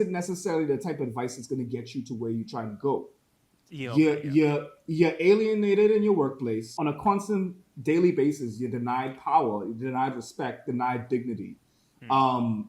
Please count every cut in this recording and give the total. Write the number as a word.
one